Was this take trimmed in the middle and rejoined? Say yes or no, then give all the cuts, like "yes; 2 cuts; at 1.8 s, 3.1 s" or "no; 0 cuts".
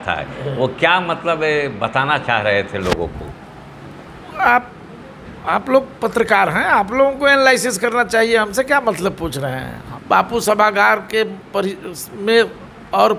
yes; 1 cut; at 9.9 s